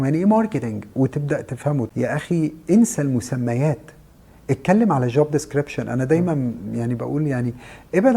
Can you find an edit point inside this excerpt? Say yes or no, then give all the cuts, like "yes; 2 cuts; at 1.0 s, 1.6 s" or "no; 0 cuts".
yes; 1 cut; at 1.9 s